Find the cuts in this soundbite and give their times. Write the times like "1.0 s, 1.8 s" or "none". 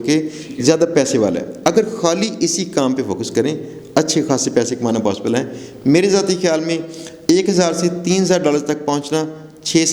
none